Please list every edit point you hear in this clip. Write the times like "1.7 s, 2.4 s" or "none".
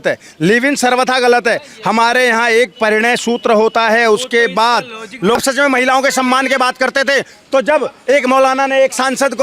5.4 s